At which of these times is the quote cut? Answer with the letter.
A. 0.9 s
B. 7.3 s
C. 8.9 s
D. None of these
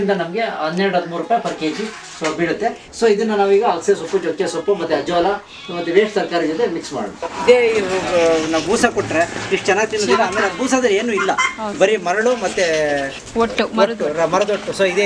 B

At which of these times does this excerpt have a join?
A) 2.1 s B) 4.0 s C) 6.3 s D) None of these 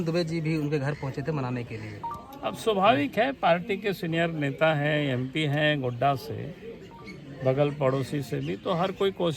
D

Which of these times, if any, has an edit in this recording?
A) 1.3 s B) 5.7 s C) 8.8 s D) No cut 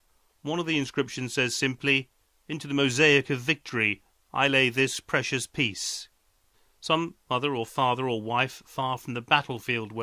B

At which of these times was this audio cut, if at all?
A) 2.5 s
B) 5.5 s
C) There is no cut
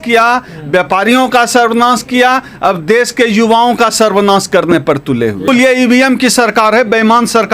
B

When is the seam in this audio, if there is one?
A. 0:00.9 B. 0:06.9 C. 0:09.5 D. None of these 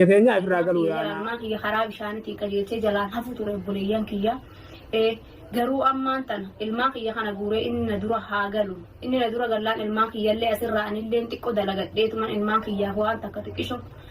A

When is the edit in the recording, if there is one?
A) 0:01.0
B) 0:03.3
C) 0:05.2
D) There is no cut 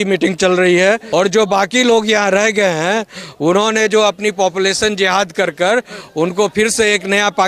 A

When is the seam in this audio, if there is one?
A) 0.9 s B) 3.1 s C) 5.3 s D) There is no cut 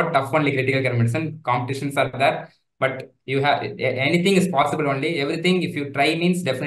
D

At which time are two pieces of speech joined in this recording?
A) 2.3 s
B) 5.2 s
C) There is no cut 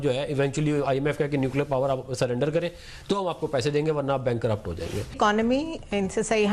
B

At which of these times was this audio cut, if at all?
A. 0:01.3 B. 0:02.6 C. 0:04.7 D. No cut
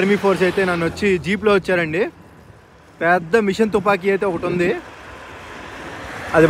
D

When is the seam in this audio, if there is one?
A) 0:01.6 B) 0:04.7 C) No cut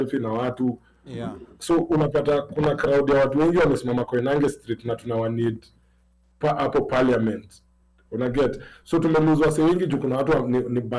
C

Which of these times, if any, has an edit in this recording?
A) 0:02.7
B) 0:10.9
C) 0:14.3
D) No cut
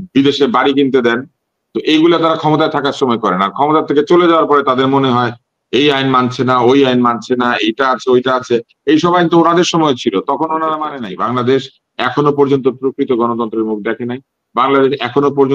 B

